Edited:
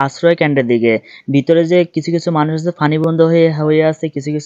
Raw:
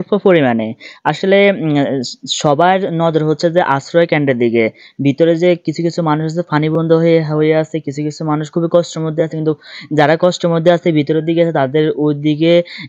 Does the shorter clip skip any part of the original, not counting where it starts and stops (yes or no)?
no